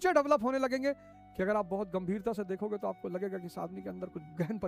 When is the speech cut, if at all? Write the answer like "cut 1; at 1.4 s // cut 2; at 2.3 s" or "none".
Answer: none